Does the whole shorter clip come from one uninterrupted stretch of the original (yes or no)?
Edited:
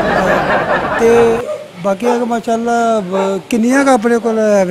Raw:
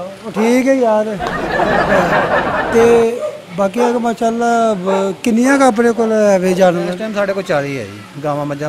no